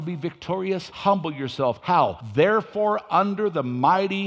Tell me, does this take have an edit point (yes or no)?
yes